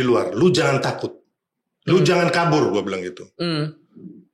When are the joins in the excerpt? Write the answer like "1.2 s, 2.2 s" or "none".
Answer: none